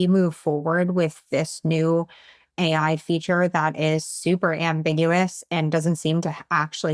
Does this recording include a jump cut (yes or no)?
no